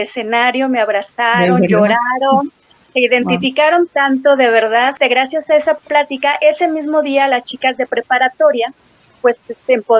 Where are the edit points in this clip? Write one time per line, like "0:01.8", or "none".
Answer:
0:05.0
0:05.8